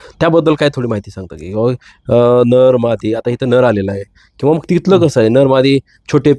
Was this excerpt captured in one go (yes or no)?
yes